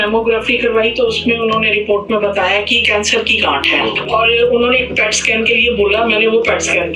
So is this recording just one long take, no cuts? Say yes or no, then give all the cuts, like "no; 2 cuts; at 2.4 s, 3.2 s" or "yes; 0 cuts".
no; 1 cut; at 2.8 s